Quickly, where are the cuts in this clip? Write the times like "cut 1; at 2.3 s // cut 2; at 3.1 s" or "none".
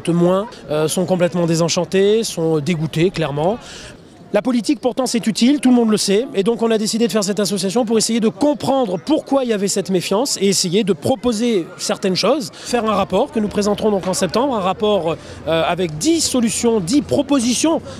cut 1; at 11.0 s

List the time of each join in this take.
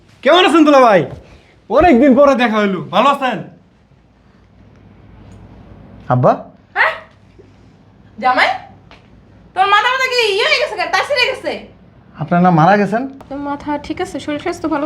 cut 1; at 13.2 s

